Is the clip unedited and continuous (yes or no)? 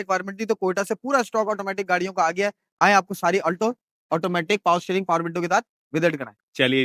yes